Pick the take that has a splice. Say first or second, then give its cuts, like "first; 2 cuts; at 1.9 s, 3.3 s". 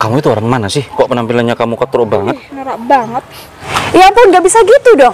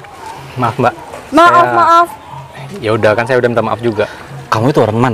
first; 1 cut; at 3.7 s